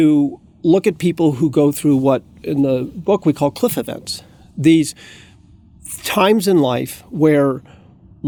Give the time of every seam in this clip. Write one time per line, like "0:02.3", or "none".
none